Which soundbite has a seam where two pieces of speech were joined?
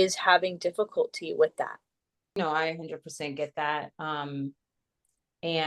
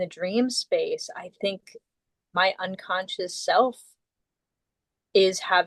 first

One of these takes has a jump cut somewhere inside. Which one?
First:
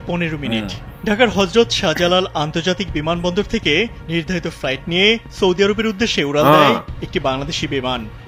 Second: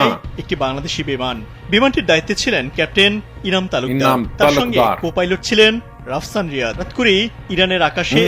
second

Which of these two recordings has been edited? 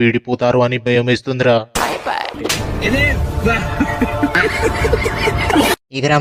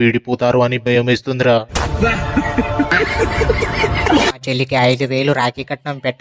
second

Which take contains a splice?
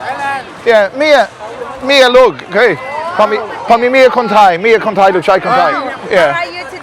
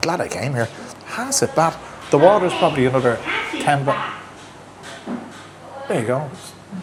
first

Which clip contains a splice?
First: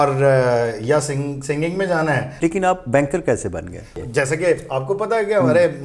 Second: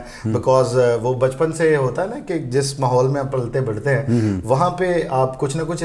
first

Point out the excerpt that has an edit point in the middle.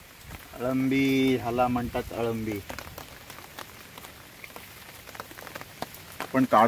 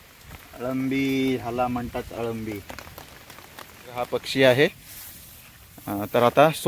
second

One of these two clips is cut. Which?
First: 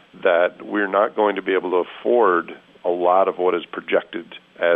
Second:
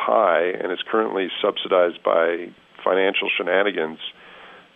second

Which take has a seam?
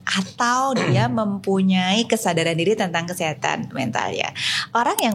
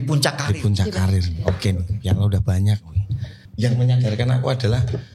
second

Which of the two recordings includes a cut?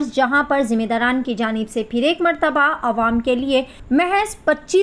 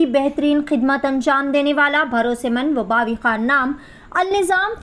first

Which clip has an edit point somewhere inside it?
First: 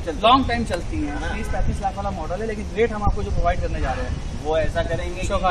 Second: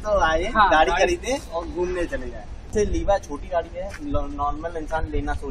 second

